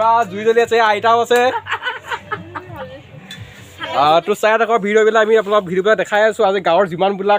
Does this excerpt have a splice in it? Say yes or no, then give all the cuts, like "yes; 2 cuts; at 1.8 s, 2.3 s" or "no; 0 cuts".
no; 0 cuts